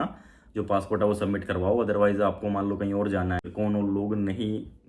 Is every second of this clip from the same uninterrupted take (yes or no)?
no